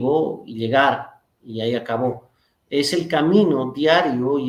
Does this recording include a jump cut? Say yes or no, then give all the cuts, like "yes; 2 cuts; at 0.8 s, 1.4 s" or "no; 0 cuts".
no; 0 cuts